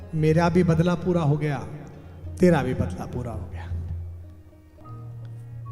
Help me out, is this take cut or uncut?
cut